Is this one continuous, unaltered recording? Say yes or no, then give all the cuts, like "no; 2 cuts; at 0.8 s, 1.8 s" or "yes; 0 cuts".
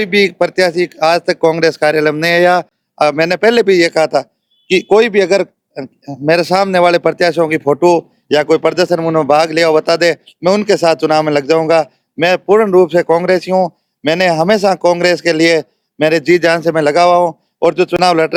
yes; 0 cuts